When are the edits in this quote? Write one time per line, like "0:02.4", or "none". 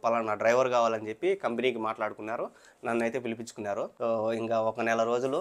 0:03.9